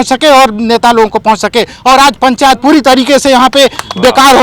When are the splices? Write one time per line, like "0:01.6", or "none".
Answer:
none